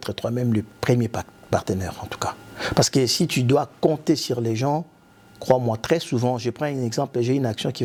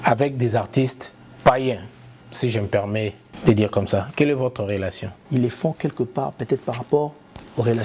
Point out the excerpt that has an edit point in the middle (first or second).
second